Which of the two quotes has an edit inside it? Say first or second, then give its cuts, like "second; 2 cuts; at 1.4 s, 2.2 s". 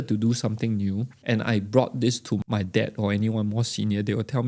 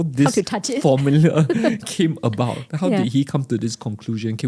first; 2 cuts; at 1.1 s, 2.4 s